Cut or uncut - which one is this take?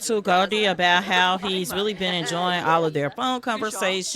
uncut